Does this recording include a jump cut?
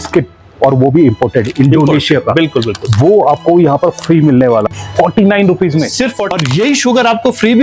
yes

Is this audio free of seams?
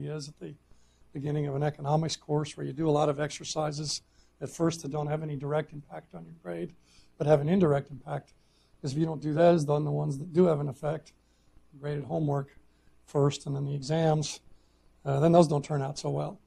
yes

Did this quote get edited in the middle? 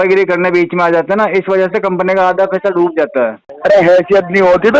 yes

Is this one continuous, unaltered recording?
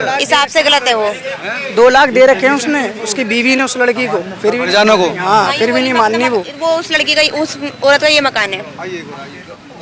yes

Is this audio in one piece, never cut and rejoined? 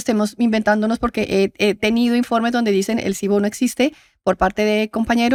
yes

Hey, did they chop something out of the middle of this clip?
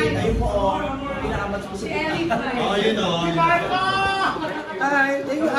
no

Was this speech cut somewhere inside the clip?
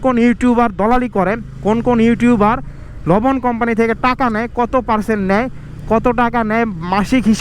no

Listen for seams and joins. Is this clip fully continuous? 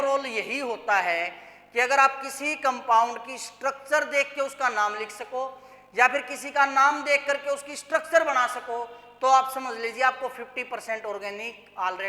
yes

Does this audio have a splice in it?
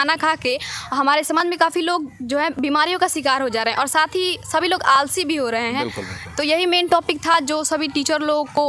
no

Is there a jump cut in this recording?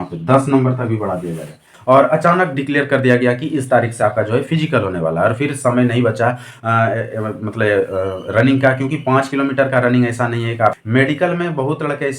yes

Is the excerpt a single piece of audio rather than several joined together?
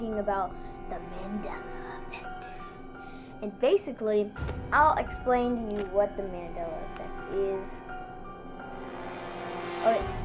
yes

